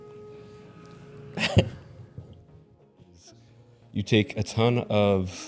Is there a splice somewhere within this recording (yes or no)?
no